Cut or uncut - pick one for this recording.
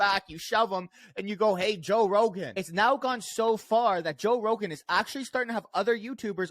cut